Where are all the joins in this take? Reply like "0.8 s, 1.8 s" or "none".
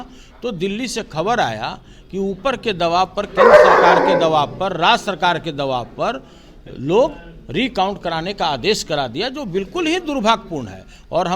none